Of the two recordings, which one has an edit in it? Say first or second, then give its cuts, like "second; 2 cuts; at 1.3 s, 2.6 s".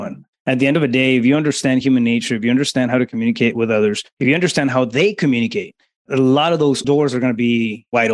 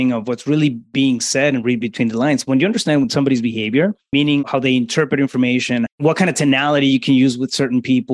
second; 2 cuts; at 4.0 s, 5.9 s